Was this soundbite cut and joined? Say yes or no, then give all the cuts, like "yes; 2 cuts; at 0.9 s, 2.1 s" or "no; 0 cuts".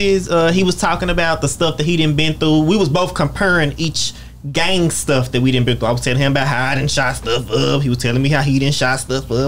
no; 0 cuts